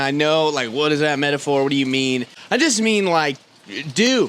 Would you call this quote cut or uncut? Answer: cut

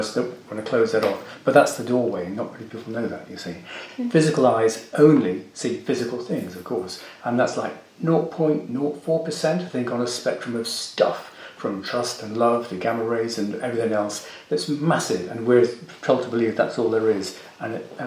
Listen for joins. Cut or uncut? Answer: cut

